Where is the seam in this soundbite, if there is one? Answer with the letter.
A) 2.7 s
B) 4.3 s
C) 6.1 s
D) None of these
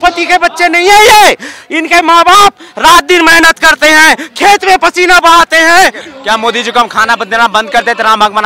C